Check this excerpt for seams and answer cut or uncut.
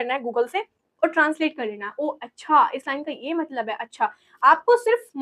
uncut